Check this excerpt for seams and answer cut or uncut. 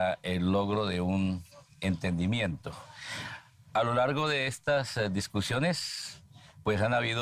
cut